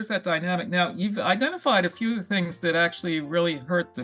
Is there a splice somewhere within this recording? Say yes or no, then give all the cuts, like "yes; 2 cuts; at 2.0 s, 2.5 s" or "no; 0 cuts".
no; 0 cuts